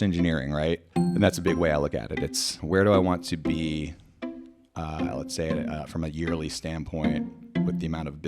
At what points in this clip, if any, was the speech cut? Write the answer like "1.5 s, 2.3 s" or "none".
1.0 s, 2.6 s